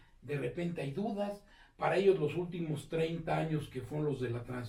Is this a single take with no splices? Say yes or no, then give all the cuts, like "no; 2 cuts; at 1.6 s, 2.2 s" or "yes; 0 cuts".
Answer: yes; 0 cuts